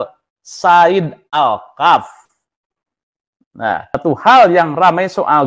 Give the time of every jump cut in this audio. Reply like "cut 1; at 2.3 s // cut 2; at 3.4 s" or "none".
cut 1; at 4.0 s